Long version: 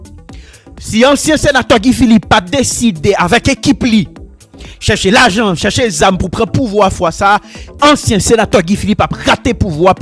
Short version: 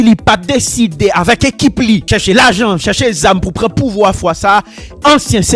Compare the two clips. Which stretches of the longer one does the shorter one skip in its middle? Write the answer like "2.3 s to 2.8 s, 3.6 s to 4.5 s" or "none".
4.1 s to 4.8 s